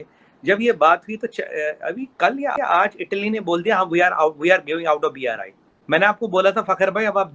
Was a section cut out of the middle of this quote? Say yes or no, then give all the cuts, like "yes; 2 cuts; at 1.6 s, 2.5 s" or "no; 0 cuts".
no; 0 cuts